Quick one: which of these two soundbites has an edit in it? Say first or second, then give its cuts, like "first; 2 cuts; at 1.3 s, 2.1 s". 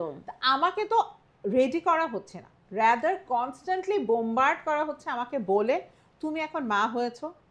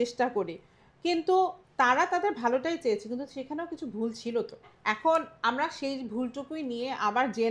second; 2 cuts; at 1.6 s, 4.7 s